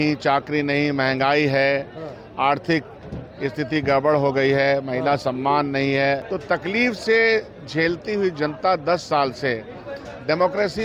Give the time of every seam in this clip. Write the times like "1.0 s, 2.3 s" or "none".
6.2 s